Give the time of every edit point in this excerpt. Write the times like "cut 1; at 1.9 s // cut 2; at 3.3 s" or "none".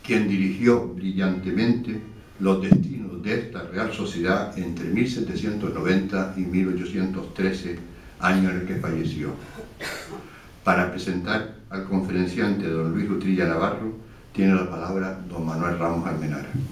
cut 1; at 1.5 s